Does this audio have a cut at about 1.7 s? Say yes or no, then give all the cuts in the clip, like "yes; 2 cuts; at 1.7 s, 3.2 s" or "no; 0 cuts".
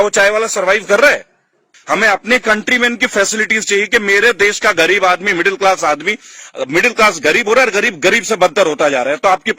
yes; 1 cut; at 1.7 s